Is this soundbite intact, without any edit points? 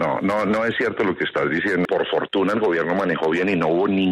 no; 1 cut; at 1.9 s

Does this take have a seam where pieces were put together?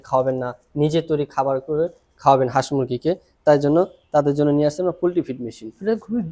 no; 0 cuts

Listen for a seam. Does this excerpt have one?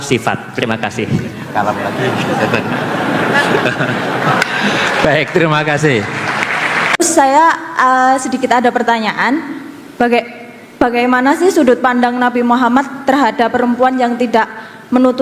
yes; 1 cut; at 6.9 s

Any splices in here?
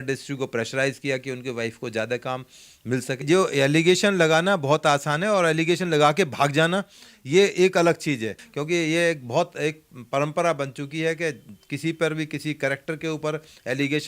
yes; 2 cuts; at 3.2 s, 8.4 s

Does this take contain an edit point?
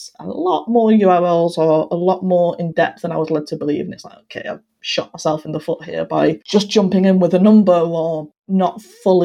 yes; 2 cuts; at 6.4 s, 8.3 s

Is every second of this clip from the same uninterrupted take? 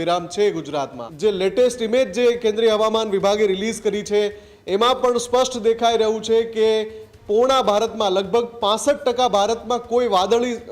no; 1 cut; at 1.0 s

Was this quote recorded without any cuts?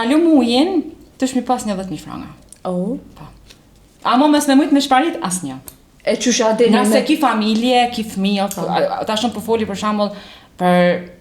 yes; 0 cuts

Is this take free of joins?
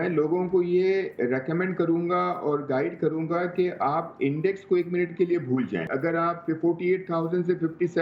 no; 1 cut; at 5.9 s

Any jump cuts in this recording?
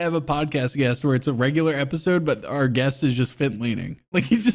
no; 0 cuts

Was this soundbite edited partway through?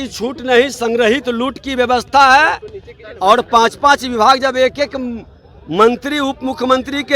no; 0 cuts

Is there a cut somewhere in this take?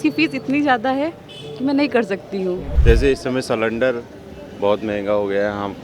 yes; 1 cut; at 2.7 s

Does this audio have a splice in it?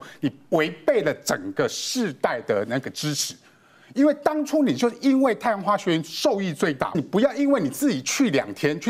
yes; 1 cut; at 7.0 s

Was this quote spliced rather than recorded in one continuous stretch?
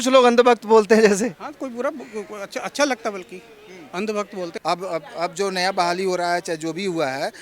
yes; 1 cut; at 4.5 s

